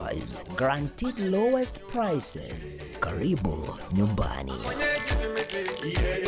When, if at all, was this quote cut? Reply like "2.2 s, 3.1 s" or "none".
4.6 s